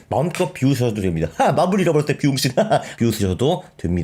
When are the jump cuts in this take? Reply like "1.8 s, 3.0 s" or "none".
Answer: 2.9 s